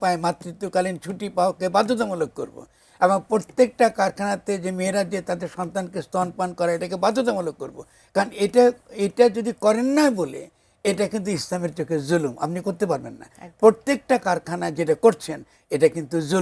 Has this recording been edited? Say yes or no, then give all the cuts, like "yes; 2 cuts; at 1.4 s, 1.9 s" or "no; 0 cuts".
no; 0 cuts